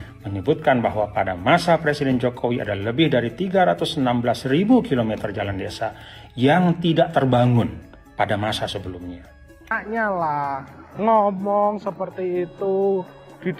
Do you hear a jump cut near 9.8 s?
yes; 1 cut; at 9.8 s

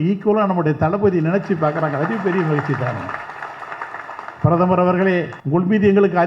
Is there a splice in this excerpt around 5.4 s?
yes; 1 cut; at 5.4 s

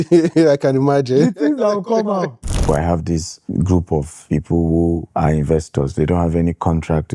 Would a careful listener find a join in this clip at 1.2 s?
no; 3 cuts; at 2.9 s, 4.2 s, 5.1 s

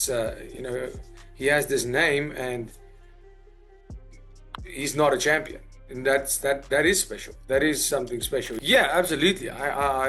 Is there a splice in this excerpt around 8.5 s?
yes; 1 cut; at 8.5 s

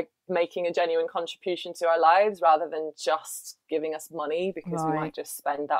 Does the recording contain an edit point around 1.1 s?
no; 0 cuts

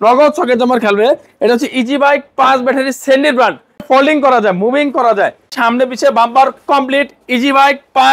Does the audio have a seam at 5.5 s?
yes; 2 cuts; at 3.8 s, 5.5 s

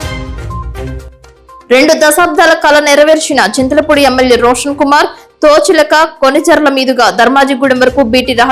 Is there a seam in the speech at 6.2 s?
no; 1 cut; at 1.6 s

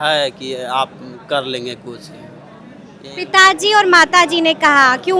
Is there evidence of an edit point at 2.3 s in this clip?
no; 0 cuts

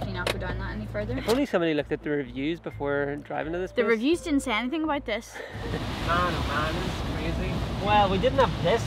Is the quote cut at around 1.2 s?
yes; 3 cuts; at 1.2 s, 5.7 s, 7.8 s

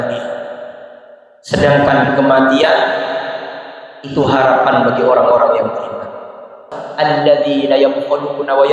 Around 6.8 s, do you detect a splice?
yes; 1 cut; at 6.8 s

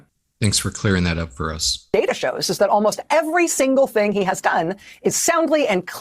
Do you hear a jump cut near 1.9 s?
yes; 1 cut; at 1.9 s

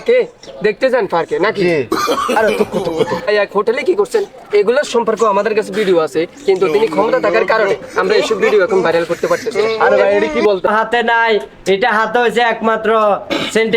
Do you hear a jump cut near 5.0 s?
no; 2 cuts; at 3.3 s, 10.7 s

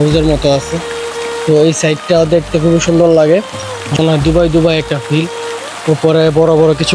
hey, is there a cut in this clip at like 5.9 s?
no; 1 cut; at 4.0 s

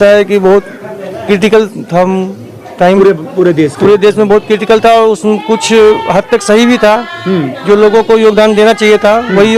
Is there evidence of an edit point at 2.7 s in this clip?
no; 0 cuts

